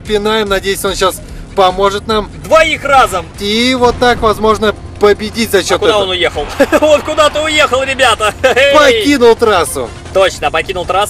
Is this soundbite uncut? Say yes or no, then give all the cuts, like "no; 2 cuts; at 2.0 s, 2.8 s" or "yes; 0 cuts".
no; 1 cut; at 3.4 s